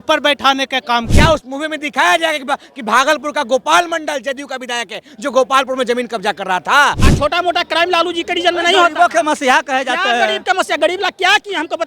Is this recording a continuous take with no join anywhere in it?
no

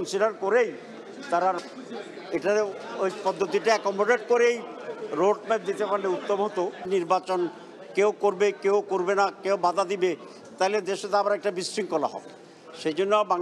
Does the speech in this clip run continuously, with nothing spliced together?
yes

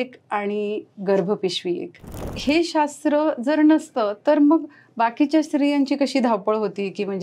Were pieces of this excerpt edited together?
yes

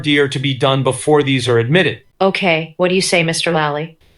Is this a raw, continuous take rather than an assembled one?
yes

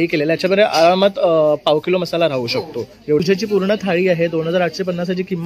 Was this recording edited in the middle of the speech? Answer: yes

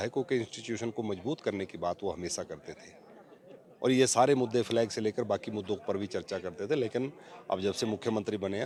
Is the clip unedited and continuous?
yes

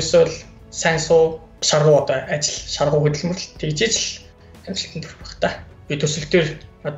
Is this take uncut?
no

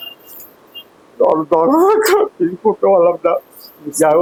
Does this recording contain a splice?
no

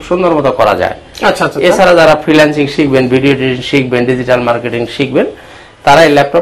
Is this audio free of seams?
yes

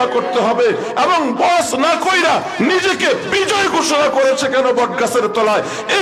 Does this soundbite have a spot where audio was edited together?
no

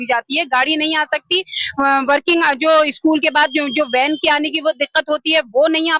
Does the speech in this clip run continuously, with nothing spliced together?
yes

